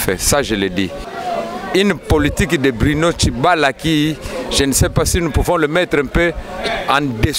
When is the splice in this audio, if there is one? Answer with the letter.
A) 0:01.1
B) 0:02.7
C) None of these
A